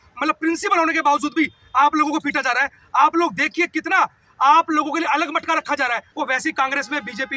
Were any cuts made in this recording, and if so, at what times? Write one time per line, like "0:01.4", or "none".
0:06.1

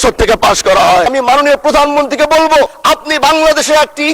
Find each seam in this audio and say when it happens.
0:01.1
0:02.8

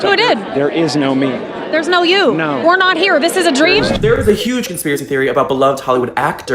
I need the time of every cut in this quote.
0:03.9

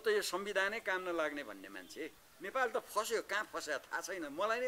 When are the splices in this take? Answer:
0:02.2

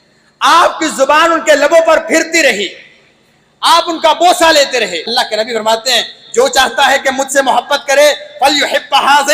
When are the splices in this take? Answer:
0:05.1

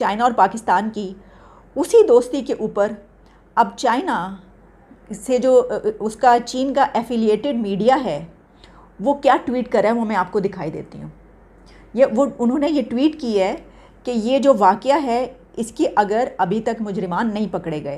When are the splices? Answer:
none

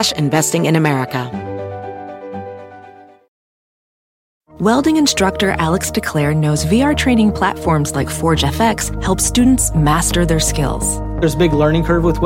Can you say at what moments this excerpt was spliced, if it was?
0:01.3

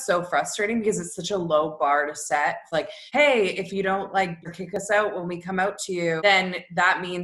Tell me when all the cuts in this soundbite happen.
0:02.8
0:04.5
0:06.2

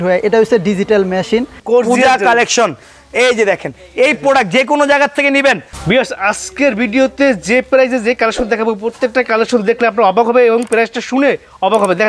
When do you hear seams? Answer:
0:01.5
0:05.7

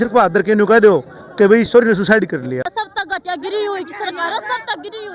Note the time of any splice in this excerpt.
0:02.8

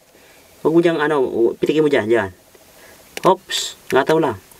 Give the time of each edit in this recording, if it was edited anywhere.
none

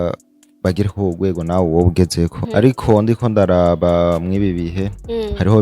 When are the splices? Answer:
0:02.4

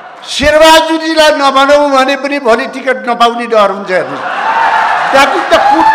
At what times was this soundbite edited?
none

